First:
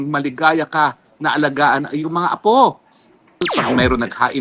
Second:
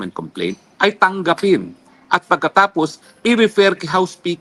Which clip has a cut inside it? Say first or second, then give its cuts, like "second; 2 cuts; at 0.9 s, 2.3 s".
first; 1 cut; at 3.5 s